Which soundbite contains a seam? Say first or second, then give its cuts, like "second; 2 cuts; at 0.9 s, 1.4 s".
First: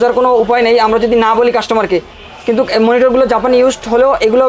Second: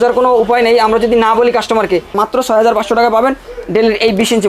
second; 1 cut; at 2.1 s